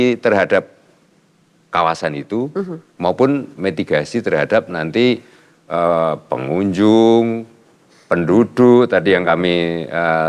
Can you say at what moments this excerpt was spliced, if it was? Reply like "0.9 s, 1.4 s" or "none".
none